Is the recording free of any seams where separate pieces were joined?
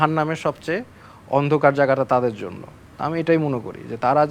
yes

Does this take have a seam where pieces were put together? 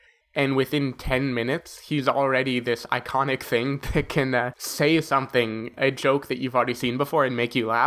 yes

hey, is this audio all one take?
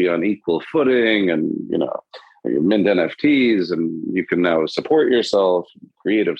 no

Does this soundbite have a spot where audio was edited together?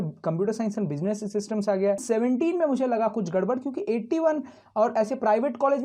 yes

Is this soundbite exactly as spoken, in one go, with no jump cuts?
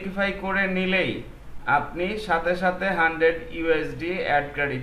yes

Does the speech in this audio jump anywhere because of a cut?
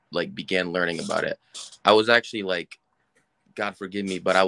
no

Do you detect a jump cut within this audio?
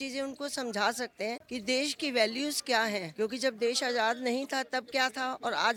no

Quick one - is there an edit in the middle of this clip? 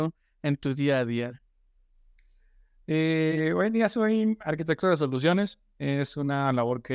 no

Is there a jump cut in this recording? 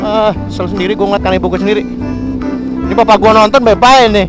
no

